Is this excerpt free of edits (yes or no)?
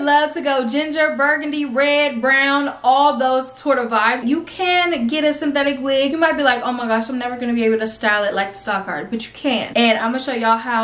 no